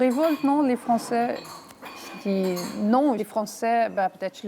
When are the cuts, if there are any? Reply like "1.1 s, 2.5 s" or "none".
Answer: 3.2 s